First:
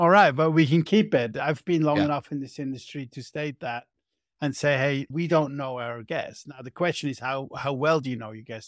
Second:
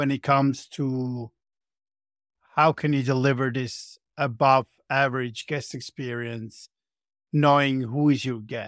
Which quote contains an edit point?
first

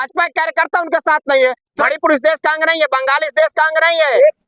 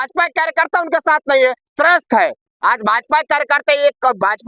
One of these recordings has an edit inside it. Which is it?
first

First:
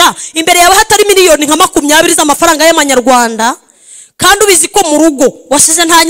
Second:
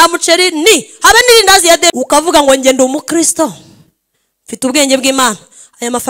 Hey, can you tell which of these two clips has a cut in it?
second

